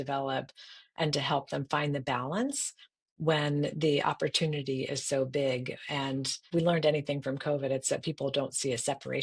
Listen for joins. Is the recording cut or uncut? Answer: cut